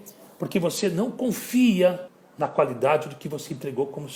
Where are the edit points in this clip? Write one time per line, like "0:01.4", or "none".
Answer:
none